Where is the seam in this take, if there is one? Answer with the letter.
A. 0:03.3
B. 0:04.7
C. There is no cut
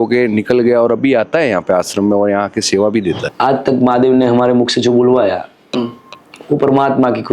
A